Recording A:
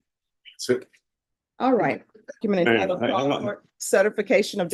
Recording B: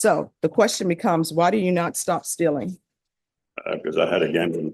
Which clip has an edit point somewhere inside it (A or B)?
A